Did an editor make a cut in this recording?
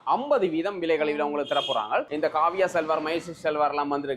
yes; 1 cut; at 2.1 s

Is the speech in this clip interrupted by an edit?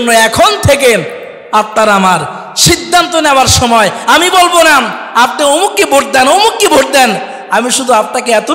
no; 0 cuts

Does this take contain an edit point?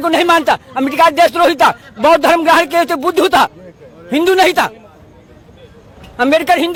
no; 0 cuts

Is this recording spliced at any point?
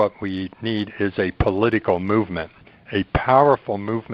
no; 0 cuts

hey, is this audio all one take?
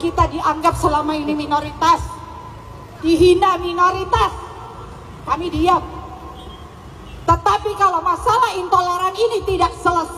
yes; 0 cuts

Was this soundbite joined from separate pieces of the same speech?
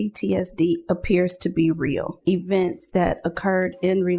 yes; 1 cut; at 2.2 s

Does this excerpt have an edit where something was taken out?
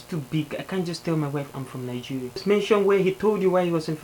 yes; 1 cut; at 2.4 s

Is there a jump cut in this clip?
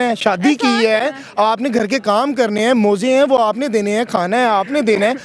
no; 0 cuts

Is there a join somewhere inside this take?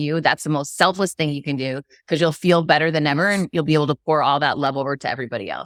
no; 0 cuts

